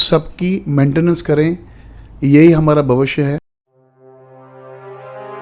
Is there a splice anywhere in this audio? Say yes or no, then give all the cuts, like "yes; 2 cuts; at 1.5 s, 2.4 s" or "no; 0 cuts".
yes; 1 cut; at 3.6 s